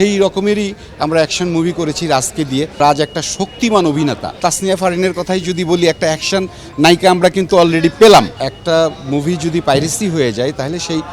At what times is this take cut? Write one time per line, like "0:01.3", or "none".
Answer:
0:02.8
0:04.4
0:08.5